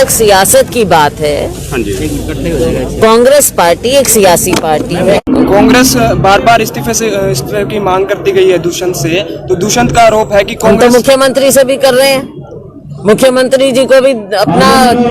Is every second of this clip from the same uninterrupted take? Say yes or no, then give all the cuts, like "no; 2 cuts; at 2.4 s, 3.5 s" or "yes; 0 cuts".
no; 1 cut; at 5.2 s